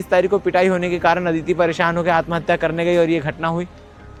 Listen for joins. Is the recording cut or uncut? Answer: uncut